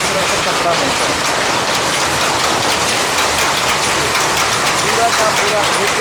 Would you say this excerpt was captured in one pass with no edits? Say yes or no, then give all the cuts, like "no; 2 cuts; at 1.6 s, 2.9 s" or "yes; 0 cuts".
yes; 0 cuts